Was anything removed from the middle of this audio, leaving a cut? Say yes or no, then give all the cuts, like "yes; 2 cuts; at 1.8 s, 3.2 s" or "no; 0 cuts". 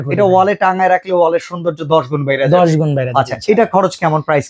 no; 0 cuts